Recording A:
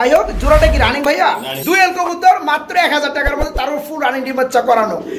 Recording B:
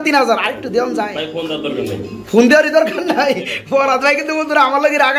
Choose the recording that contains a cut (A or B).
A